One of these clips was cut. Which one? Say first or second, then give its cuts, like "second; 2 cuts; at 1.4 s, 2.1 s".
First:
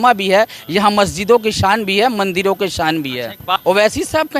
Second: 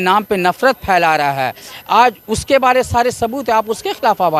first; 1 cut; at 3.4 s